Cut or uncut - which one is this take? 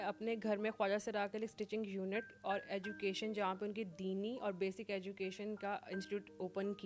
uncut